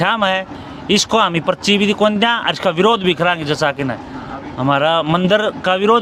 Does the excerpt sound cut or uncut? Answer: uncut